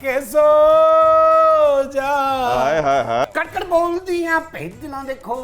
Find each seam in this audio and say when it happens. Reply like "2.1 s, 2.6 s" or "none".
3.2 s

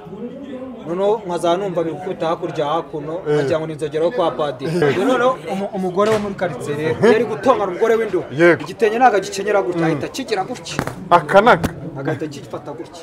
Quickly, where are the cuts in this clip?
4.8 s

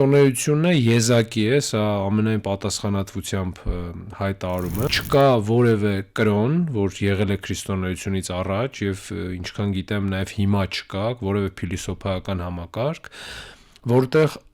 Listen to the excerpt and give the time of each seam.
4.9 s

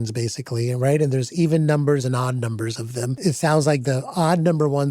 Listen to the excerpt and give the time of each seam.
3.2 s

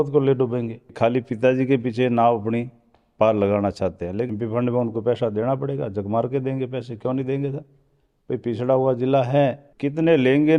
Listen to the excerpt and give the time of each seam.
0.9 s, 4.3 s, 9.7 s

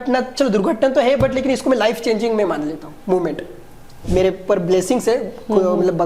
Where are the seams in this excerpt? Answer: 4.0 s

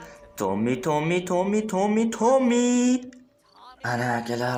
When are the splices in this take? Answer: none

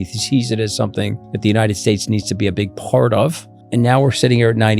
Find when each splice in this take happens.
1.2 s, 3.6 s

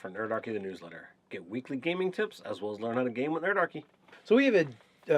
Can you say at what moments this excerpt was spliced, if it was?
3.1 s

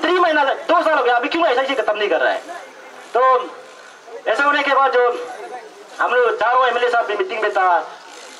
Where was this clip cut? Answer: none

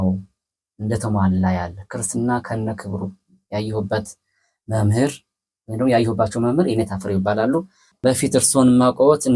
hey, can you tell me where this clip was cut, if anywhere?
7.9 s

